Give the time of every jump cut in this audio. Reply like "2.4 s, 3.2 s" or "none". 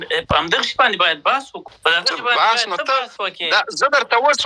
1.6 s